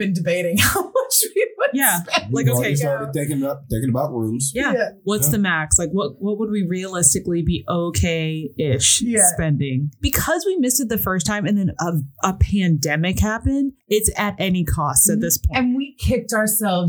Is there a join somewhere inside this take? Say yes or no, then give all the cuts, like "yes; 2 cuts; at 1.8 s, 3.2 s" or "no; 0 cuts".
yes; 2 cuts; at 10.0 s, 13.8 s